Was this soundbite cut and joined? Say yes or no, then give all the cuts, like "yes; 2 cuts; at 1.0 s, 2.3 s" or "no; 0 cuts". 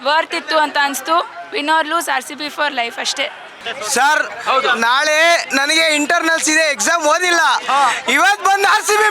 yes; 1 cut; at 3.5 s